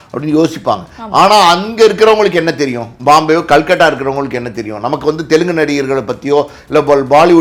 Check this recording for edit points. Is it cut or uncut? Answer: uncut